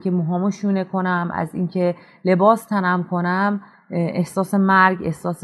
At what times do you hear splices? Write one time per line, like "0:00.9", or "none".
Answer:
none